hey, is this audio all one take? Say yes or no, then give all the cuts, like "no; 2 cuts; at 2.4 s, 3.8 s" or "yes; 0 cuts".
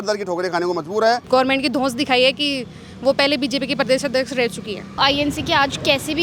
no; 2 cuts; at 1.2 s, 5.0 s